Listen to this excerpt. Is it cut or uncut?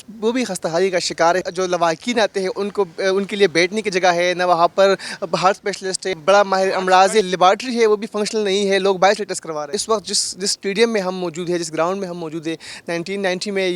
cut